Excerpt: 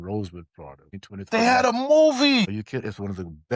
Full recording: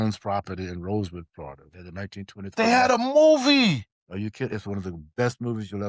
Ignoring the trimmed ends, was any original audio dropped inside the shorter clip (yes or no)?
yes